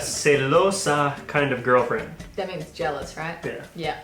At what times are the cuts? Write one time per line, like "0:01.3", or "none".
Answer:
none